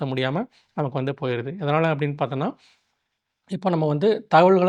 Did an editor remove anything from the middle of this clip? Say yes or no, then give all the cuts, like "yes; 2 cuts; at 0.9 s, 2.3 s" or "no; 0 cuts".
no; 0 cuts